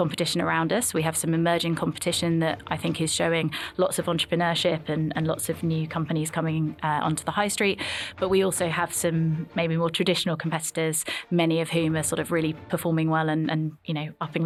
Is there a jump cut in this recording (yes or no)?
no